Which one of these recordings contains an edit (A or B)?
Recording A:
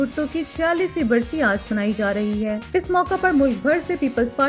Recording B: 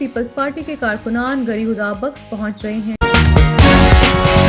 B